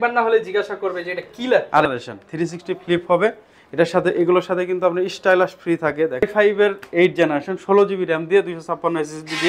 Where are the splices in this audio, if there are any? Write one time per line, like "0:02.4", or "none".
0:01.8
0:06.3